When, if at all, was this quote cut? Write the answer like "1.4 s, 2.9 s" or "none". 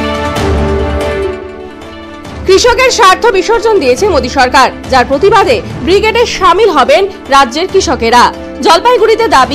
1.2 s